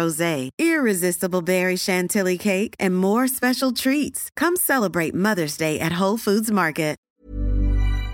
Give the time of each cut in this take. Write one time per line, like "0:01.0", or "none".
0:07.0